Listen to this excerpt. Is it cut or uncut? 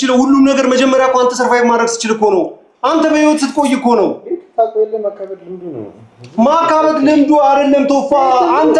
uncut